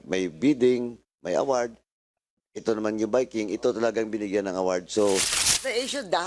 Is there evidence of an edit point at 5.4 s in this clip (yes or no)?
yes